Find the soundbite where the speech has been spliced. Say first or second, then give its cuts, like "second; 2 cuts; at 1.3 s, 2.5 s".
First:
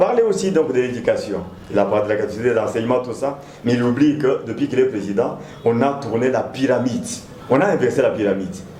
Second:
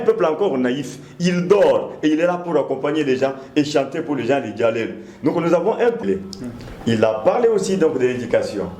second; 1 cut; at 6.0 s